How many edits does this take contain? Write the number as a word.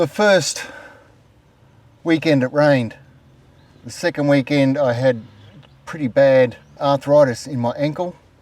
one